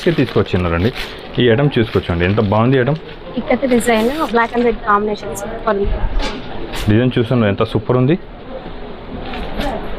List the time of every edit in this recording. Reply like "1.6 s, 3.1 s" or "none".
none